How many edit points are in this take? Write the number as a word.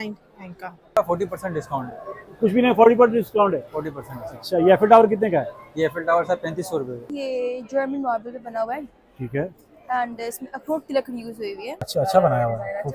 three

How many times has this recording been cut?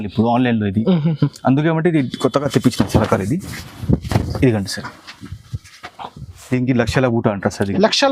one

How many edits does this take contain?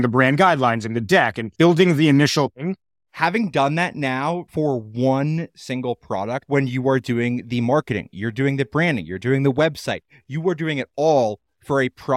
three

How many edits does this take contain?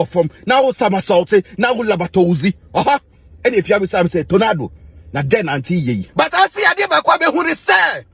one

